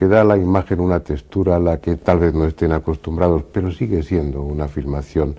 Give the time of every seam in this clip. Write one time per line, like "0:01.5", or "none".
0:04.3

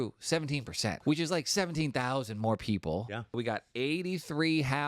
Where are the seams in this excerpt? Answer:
0:01.0
0:03.4

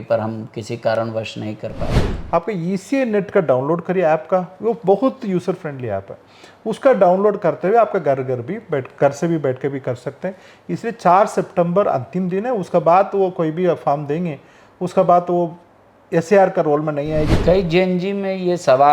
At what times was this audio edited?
0:02.1
0:17.4

